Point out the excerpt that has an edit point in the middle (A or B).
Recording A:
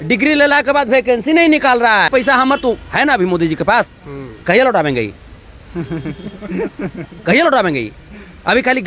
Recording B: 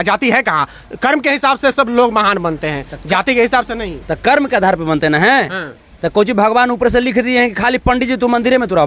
A